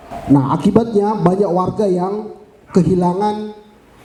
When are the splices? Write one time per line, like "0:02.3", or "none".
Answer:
none